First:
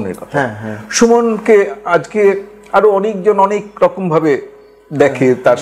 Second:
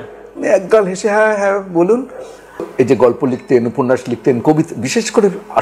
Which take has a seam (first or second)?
second